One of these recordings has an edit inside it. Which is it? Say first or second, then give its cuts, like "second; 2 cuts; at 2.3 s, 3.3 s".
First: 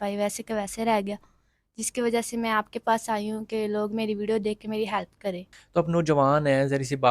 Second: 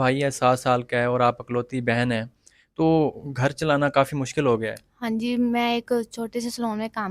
first; 1 cut; at 5.5 s